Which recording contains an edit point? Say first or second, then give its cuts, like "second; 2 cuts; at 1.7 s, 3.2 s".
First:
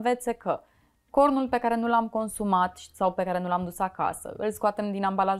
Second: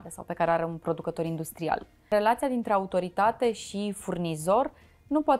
second; 1 cut; at 2.1 s